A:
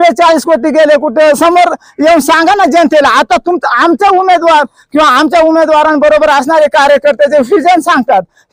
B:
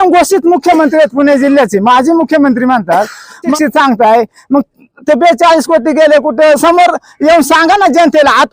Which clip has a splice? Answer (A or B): B